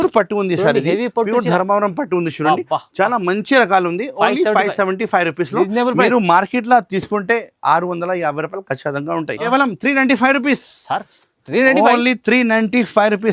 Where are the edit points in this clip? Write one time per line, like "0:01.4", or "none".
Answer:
0:09.5